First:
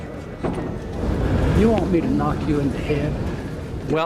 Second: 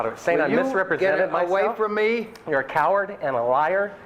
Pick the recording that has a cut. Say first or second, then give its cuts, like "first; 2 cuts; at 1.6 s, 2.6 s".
first; 1 cut; at 1.0 s